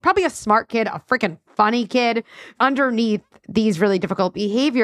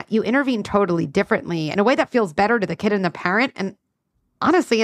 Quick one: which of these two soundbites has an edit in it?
first; 1 cut; at 2.5 s

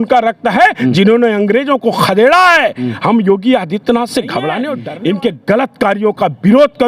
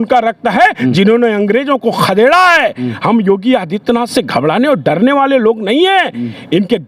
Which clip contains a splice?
first; 1 cut; at 4.7 s

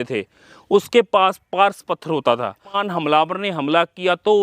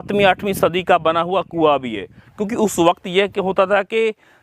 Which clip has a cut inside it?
first; 1 cut; at 2.9 s

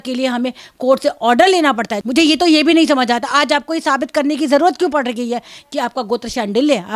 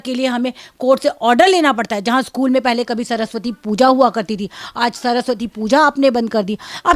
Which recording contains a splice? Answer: first; 1 cut; at 1.9 s

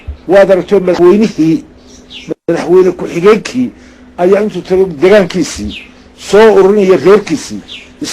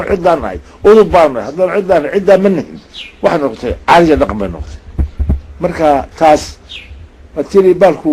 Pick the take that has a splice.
first; 1 cut; at 1.0 s

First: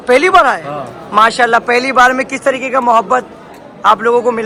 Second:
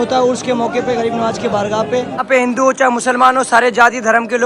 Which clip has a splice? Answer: second; 1 cut; at 2.2 s

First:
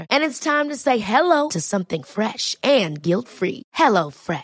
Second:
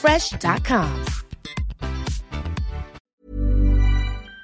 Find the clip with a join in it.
second; 1 cut; at 3.1 s

